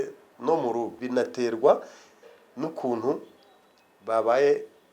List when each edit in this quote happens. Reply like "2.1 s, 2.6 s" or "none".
1.0 s